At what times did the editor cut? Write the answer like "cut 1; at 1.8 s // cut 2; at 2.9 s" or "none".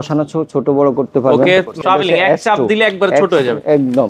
cut 1; at 1.7 s